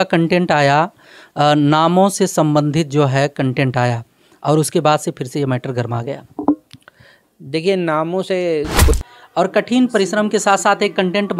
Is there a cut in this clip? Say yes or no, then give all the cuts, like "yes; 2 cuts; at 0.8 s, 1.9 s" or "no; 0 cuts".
yes; 1 cut; at 8.9 s